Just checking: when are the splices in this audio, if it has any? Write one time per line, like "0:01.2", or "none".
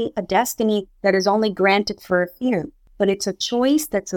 0:02.8